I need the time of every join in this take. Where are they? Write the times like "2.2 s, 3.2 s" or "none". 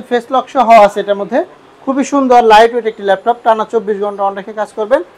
none